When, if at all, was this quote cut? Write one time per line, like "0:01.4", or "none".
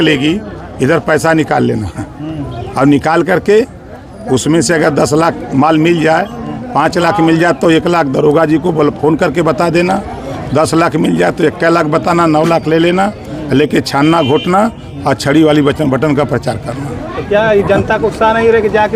none